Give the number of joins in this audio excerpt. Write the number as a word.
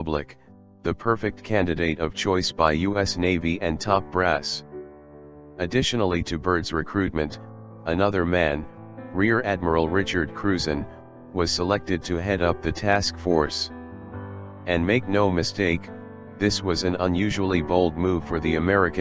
zero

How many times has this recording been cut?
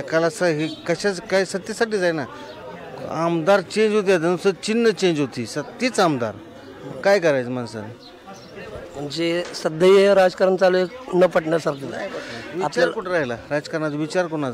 zero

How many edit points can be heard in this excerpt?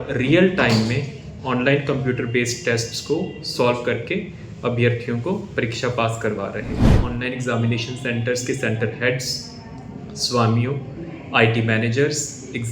one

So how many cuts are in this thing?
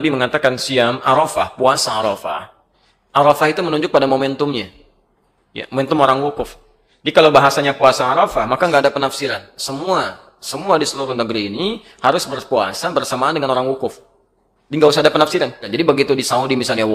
one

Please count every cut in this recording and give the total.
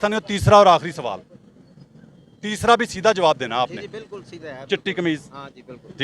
zero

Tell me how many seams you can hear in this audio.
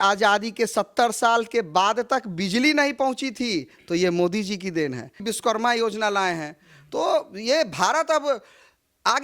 one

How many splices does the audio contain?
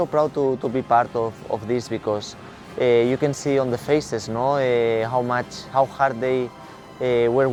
zero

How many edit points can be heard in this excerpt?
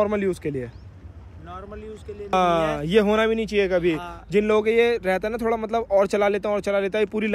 one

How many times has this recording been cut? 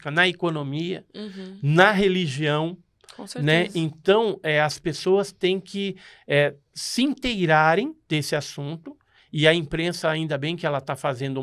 zero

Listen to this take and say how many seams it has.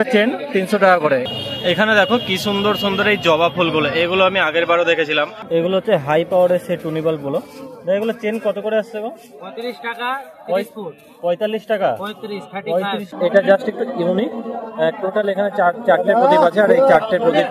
three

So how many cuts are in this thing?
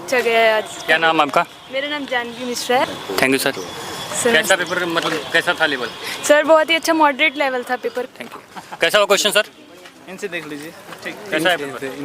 two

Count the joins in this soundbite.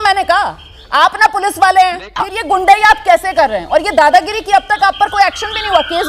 one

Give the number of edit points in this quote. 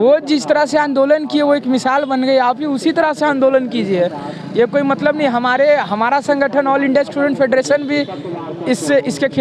zero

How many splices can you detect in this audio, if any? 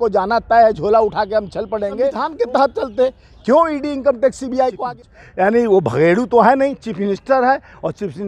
two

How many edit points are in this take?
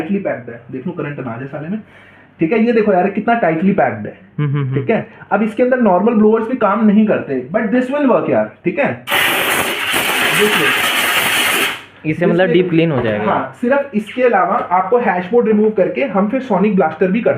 zero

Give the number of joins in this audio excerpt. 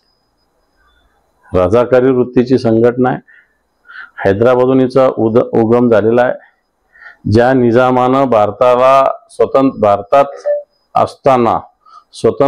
zero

